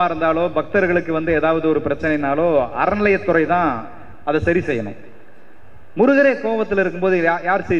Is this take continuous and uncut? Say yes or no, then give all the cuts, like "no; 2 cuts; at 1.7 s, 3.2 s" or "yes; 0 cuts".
yes; 0 cuts